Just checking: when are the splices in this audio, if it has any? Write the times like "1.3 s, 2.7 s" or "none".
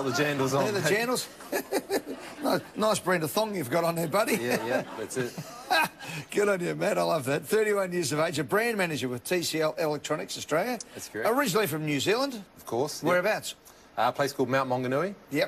3.8 s